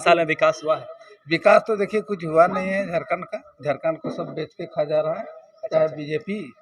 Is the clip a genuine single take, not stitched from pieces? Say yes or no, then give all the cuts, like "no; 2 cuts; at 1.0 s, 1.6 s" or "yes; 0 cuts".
yes; 0 cuts